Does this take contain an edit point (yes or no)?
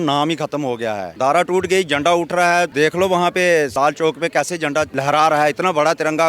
yes